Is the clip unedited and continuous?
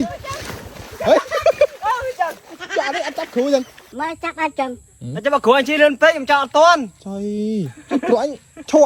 no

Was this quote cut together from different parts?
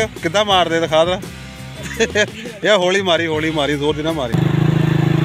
yes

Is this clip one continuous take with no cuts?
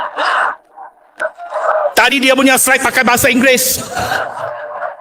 yes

